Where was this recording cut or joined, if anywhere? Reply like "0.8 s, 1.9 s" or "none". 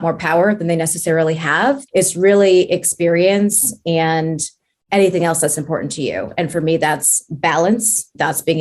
none